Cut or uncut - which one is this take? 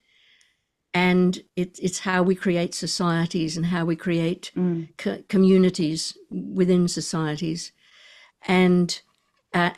uncut